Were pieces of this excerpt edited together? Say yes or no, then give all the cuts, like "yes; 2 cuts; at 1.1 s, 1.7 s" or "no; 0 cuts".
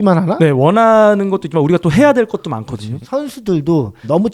yes; 1 cut; at 2.9 s